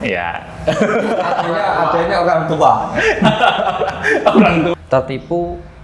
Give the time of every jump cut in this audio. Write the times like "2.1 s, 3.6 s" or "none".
4.7 s